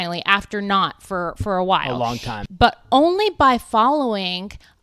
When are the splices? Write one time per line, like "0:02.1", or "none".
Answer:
0:02.3

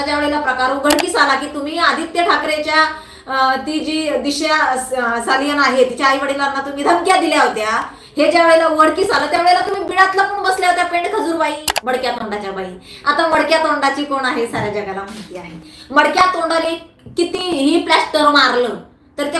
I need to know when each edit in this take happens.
0:11.7

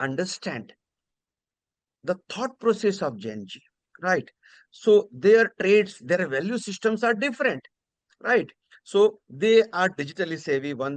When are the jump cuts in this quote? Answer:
none

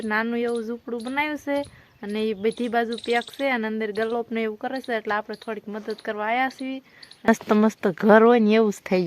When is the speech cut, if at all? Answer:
0:07.3

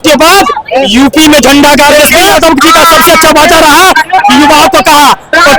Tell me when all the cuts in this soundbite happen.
0:02.3

